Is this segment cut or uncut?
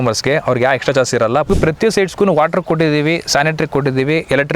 cut